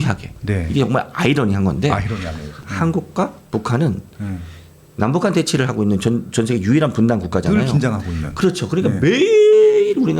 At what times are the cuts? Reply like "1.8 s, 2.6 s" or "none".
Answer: 2.7 s